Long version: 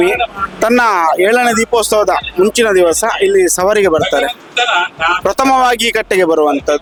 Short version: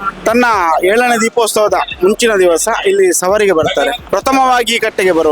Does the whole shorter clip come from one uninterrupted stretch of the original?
no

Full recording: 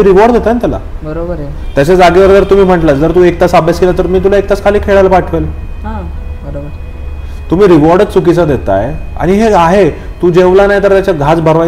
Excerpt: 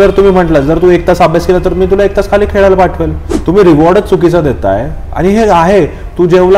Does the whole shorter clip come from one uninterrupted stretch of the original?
no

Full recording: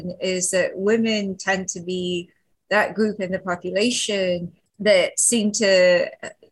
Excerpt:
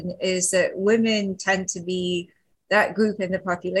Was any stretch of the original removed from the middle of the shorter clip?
no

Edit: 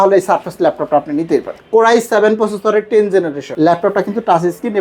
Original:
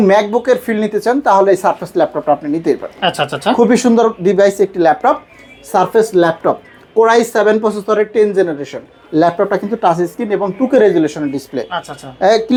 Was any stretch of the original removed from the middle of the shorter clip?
yes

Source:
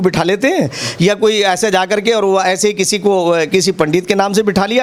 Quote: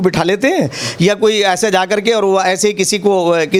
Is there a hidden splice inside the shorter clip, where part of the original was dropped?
no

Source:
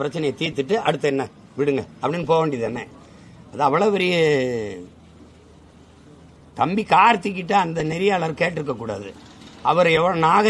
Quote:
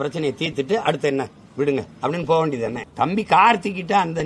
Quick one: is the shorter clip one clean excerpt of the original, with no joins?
no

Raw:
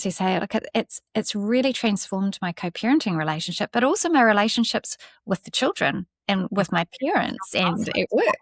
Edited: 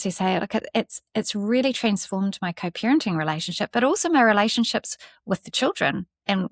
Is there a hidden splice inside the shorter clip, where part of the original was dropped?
no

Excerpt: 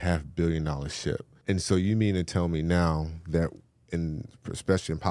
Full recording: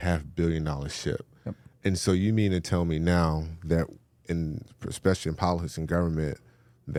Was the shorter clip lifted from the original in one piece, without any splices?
no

